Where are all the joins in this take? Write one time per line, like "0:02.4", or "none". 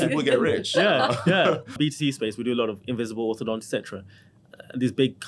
0:01.8